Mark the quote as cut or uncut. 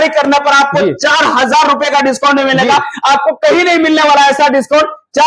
uncut